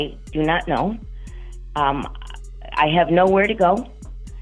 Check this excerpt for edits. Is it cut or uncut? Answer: uncut